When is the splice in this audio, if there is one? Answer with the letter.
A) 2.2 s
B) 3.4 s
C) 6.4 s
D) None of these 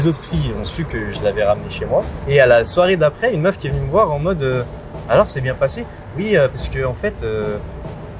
A